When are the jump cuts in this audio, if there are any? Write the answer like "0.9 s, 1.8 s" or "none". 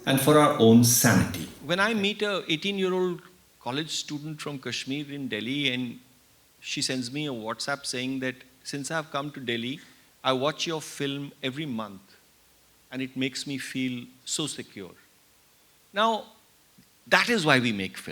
1.5 s